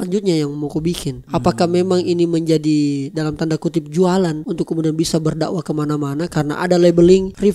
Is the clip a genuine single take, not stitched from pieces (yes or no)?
no